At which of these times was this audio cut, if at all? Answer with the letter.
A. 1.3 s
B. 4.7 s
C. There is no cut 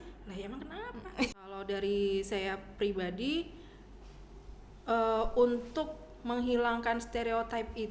A